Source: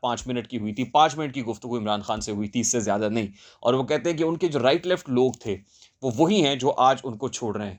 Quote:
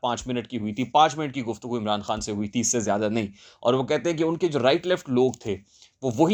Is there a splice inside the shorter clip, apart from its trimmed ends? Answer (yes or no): no